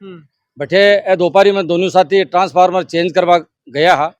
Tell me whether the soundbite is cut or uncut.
uncut